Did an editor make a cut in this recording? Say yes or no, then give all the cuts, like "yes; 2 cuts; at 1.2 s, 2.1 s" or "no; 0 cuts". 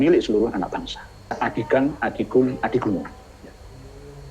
yes; 1 cut; at 1.3 s